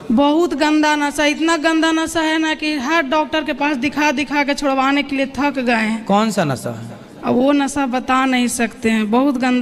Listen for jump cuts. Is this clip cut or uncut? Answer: uncut